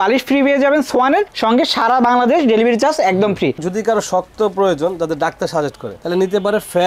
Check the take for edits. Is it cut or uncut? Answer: cut